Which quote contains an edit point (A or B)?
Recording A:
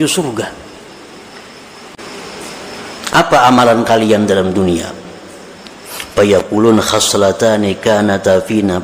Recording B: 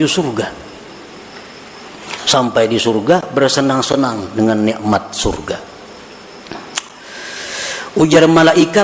A